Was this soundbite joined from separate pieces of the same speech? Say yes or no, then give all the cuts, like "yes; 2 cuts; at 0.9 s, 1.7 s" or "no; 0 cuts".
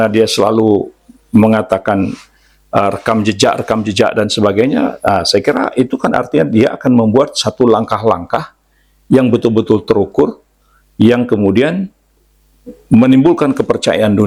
no; 0 cuts